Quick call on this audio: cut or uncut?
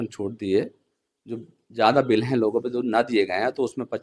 uncut